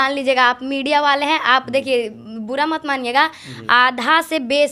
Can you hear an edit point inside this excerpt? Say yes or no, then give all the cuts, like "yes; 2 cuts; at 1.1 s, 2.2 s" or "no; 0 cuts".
no; 0 cuts